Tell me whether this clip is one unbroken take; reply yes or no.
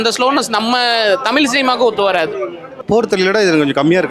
no